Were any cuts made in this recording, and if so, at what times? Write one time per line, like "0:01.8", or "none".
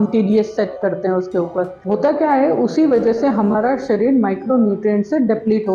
0:01.8